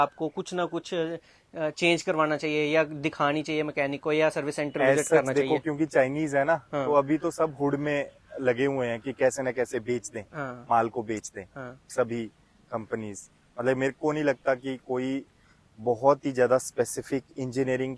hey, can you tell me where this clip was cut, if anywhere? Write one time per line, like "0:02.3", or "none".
none